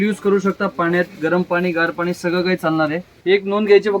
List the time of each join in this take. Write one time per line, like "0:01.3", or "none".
0:03.1

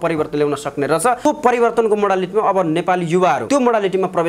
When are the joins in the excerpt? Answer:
0:01.3
0:03.5

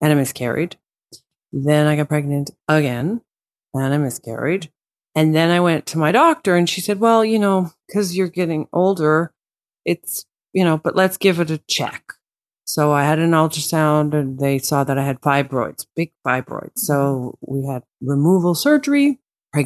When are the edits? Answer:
0:17.9

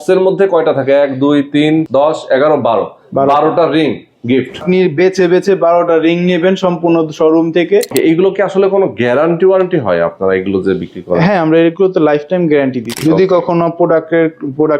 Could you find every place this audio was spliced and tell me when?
0:01.9
0:04.6
0:07.9
0:12.9

